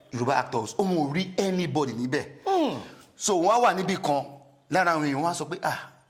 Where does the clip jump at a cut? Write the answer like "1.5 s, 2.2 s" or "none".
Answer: none